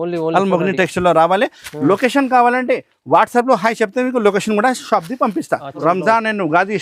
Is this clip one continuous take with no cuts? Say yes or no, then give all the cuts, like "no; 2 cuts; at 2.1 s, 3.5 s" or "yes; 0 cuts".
no; 1 cut; at 5.8 s